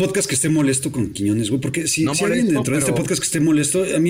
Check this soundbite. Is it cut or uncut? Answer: uncut